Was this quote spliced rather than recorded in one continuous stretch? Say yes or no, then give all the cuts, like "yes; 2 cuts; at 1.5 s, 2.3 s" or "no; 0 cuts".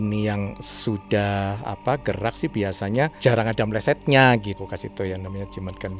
yes; 1 cut; at 4.6 s